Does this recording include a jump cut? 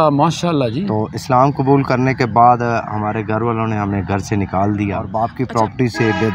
yes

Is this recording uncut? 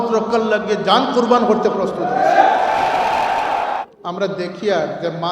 no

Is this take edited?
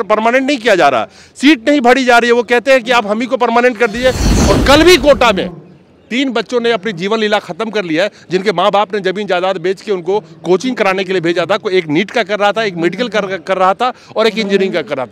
yes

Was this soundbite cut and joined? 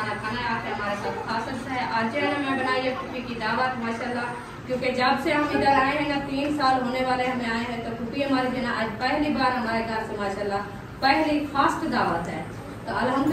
no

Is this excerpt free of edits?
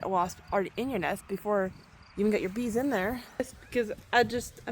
no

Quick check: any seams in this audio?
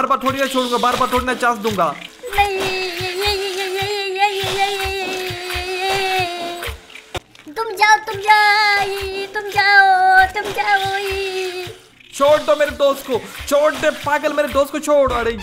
yes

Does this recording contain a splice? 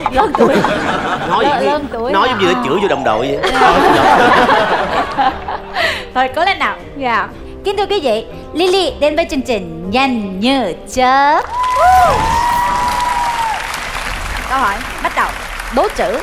no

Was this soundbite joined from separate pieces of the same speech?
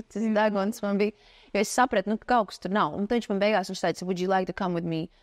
no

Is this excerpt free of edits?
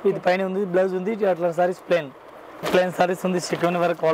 yes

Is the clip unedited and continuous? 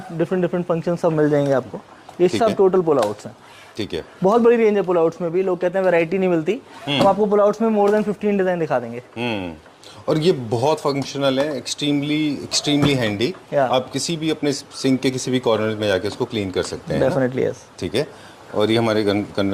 yes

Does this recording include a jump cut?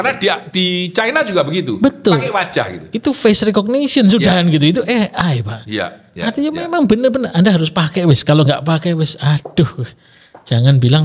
no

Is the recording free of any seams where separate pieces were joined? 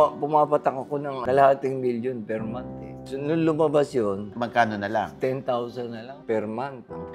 no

